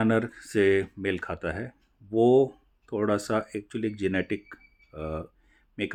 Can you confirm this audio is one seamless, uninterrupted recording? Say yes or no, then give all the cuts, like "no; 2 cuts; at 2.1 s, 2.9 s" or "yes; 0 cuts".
yes; 0 cuts